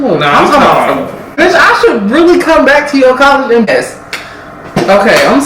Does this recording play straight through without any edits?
no; 2 cuts; at 1.3 s, 3.7 s

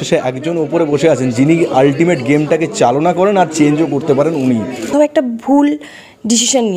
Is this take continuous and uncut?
no; 1 cut; at 4.9 s

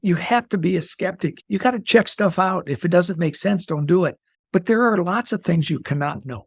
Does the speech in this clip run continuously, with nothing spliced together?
no; 1 cut; at 4.3 s

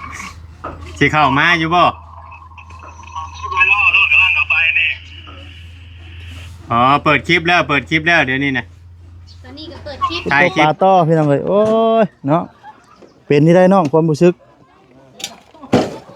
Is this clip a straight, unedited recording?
no; 1 cut; at 10.4 s

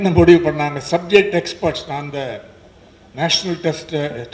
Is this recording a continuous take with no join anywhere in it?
yes; 0 cuts

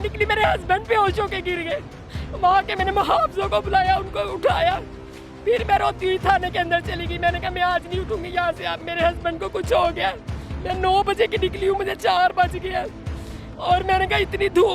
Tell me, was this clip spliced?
no; 0 cuts

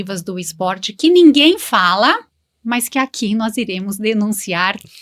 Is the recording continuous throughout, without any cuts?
yes; 0 cuts

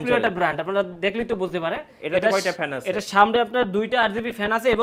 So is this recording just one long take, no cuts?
yes; 0 cuts

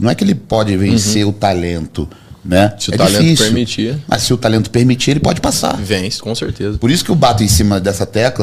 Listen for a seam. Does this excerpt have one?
no; 0 cuts

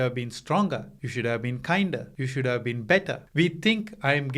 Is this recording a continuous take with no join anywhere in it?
no; 3 cuts; at 1.0 s, 2.2 s, 3.2 s

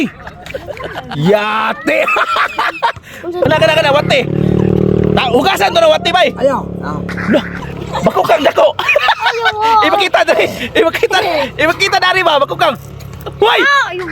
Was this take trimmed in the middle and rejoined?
yes; 2 cuts; at 3.5 s, 7.6 s

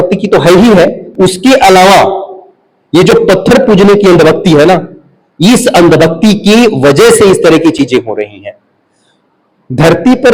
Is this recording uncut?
yes; 0 cuts

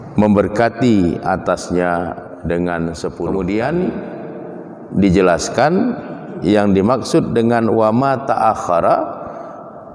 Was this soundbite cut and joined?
yes; 1 cut; at 3.3 s

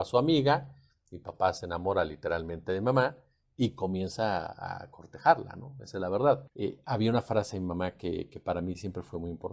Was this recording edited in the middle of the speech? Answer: yes; 1 cut; at 6.5 s

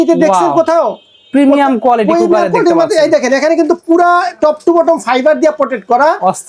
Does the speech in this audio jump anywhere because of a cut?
no; 0 cuts

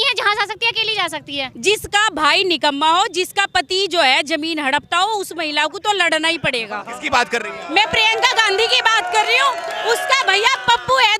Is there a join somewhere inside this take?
yes; 1 cut; at 1.5 s

